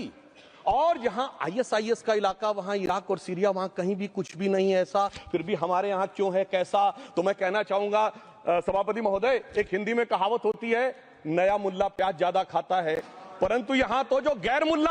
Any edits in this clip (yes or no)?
no